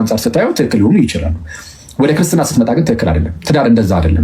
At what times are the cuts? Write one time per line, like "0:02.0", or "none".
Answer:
none